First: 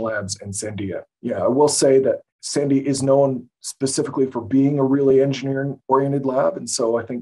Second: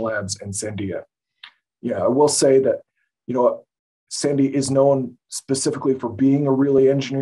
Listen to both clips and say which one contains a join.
first; 2 cuts; at 1.1 s, 2.3 s

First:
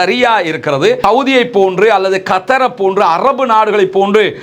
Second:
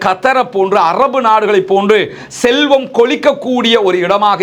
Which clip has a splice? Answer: first; 1 cut; at 1.0 s

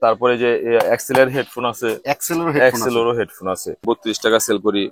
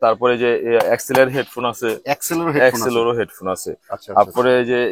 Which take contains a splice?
first; 1 cut; at 3.9 s

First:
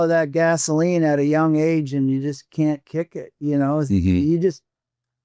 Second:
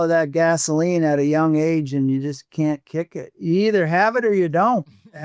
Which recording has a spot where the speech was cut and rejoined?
second; 1 cut; at 3.2 s

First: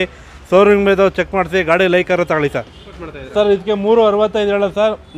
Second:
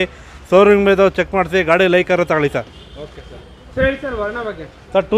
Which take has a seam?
first; 1 cut; at 2.9 s

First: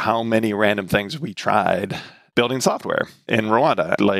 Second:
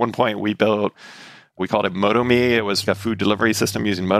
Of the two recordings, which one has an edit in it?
second; 1 cut; at 2.8 s

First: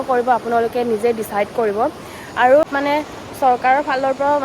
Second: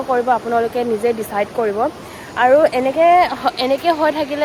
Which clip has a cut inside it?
first; 1 cut; at 2.6 s

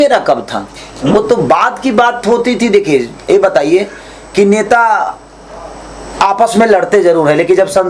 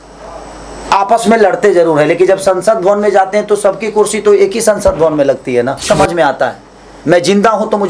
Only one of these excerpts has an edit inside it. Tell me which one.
second; 1 cut; at 5.9 s

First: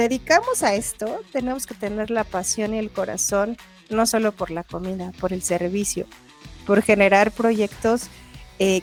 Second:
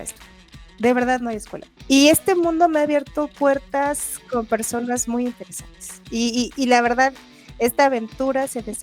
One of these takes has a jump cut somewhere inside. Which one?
second; 1 cut; at 1.8 s

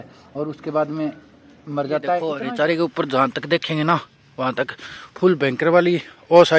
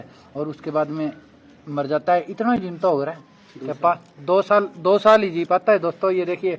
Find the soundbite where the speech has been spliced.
first; 1 cut; at 2.3 s

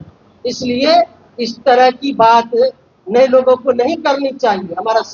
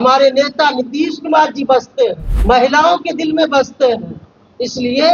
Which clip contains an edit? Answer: second; 1 cut; at 2.3 s

